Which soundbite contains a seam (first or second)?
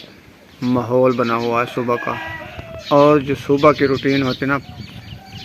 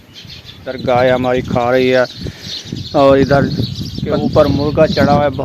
second